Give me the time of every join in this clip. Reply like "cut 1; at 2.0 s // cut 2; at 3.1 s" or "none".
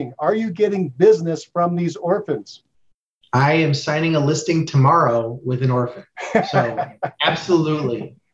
none